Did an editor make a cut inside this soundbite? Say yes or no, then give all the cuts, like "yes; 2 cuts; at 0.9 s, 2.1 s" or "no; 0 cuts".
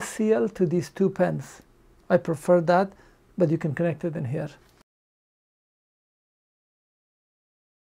no; 0 cuts